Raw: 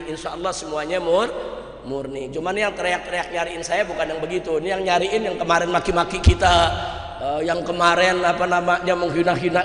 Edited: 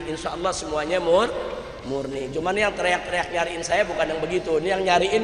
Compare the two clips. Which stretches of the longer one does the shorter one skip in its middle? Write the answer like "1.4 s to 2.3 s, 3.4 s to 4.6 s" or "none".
none